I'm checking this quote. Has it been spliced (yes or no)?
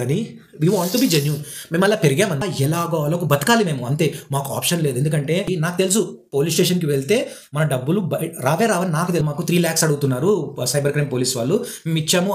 yes